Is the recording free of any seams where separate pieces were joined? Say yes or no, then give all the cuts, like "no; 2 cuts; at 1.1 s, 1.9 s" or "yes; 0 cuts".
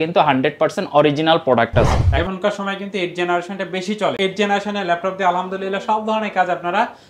no; 2 cuts; at 2.1 s, 4.2 s